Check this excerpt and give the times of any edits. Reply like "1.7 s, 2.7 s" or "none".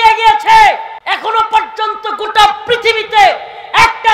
0.9 s